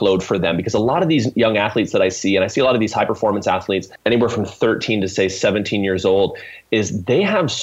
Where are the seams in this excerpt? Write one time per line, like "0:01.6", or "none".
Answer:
0:03.9